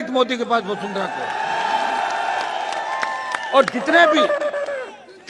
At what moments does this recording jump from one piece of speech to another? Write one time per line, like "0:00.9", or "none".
none